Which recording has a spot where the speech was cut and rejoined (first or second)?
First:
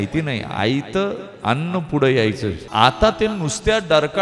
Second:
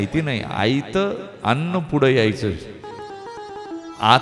first